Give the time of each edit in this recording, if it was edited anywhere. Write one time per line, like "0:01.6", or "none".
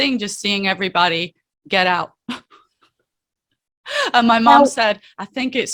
none